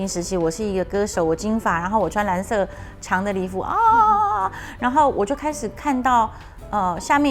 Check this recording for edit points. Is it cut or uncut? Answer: uncut